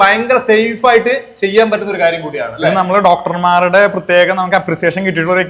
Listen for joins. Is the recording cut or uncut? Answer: uncut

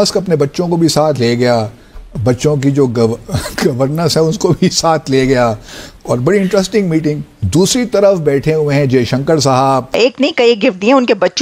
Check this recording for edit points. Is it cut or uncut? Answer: cut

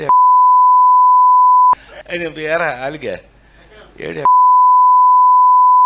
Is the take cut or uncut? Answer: cut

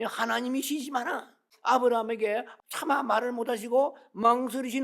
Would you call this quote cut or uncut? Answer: cut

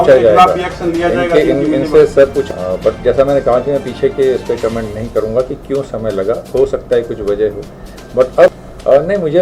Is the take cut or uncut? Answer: cut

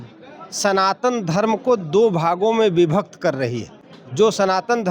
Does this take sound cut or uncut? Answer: uncut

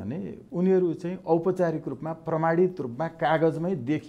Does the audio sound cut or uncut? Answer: uncut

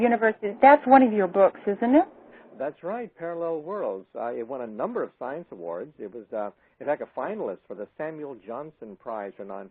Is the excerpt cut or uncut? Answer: cut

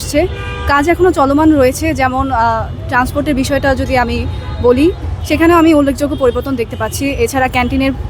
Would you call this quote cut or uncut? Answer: uncut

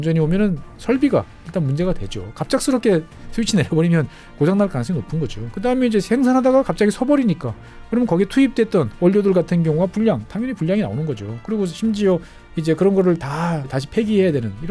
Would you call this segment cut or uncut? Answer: cut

